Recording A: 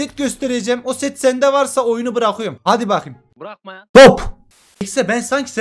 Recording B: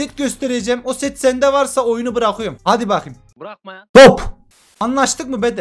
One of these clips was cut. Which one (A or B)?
A